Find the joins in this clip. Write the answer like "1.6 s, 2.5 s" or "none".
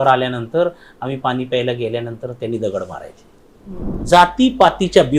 3.9 s